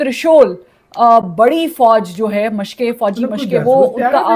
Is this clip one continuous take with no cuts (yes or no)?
yes